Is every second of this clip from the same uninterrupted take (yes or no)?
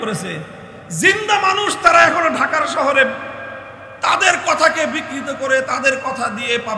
yes